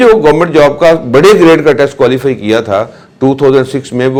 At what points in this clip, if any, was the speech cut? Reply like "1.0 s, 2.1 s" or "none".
none